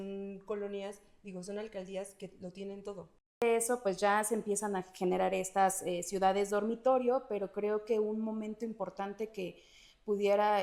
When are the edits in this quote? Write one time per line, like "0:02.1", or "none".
0:03.4